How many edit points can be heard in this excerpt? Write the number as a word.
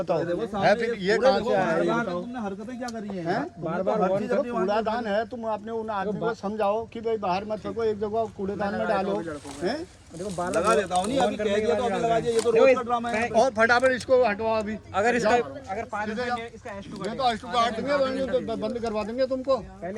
zero